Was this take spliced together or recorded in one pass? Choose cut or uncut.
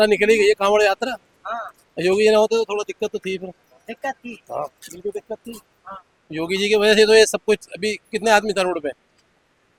uncut